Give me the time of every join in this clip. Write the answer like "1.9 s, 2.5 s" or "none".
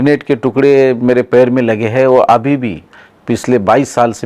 none